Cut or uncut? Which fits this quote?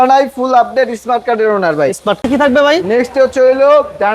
cut